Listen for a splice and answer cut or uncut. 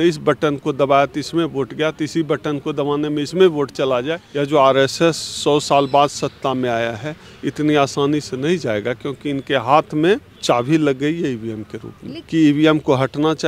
cut